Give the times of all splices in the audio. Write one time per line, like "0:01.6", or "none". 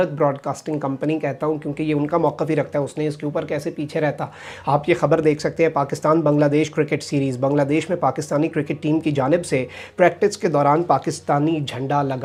none